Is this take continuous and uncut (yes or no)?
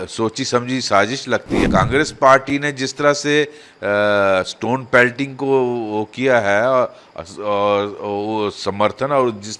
no